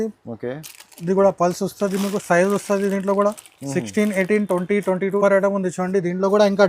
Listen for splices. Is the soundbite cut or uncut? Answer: cut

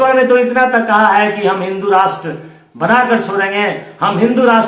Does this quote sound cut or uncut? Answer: uncut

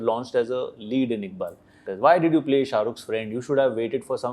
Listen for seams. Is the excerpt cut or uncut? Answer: cut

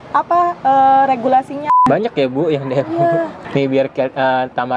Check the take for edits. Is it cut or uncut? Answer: cut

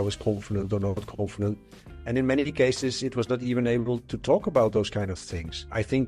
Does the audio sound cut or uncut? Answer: uncut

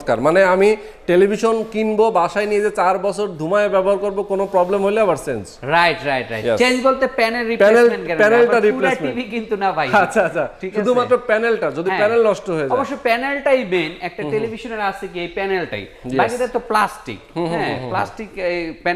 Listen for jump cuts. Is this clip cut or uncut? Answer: uncut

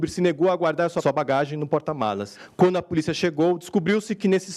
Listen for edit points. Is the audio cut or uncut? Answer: cut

